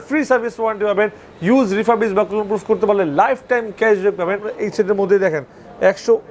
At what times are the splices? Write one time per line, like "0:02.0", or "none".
0:04.5